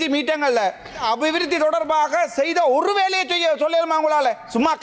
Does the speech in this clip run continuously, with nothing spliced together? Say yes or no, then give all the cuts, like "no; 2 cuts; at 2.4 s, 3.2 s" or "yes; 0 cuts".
no; 1 cut; at 1.0 s